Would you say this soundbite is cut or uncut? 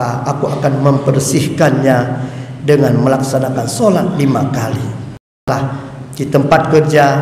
cut